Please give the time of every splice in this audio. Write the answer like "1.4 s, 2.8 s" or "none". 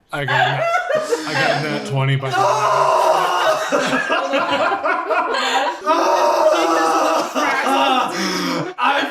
5.8 s

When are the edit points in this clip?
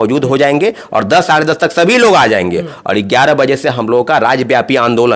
none

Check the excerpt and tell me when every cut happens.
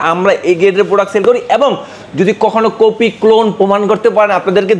none

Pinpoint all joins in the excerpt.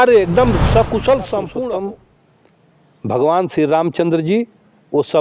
1.7 s

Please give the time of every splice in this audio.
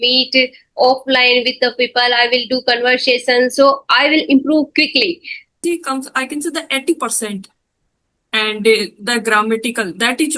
5.6 s

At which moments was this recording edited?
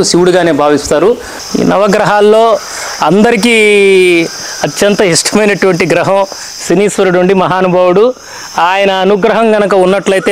1.3 s

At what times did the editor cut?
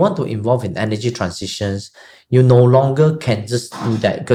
none

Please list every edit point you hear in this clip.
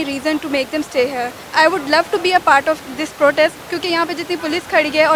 1.5 s, 2.9 s, 3.6 s

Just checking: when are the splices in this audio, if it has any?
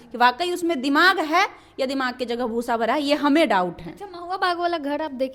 none

